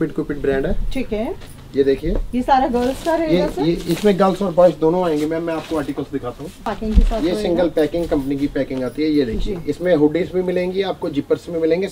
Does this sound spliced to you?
no; 0 cuts

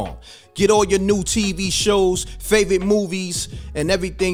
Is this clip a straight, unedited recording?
yes; 0 cuts

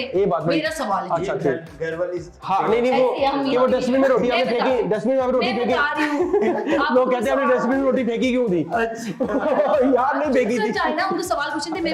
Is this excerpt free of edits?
yes; 0 cuts

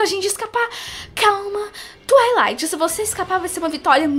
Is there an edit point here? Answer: no; 0 cuts

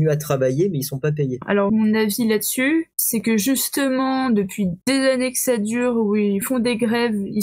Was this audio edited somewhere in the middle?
yes; 4 cuts; at 1.4 s, 3.0 s, 4.8 s, 6.5 s

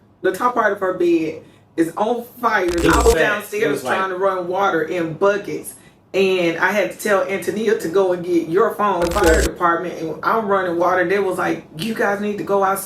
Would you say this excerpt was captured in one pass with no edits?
no; 2 cuts; at 2.8 s, 9.5 s

